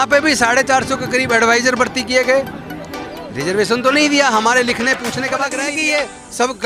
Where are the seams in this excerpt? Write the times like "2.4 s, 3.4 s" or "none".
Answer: 5.6 s